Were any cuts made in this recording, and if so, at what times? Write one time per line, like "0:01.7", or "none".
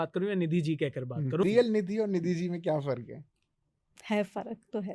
0:01.4